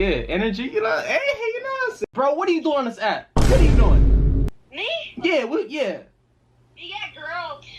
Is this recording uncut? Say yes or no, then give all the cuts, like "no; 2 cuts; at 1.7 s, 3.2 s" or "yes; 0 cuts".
no; 1 cut; at 2.0 s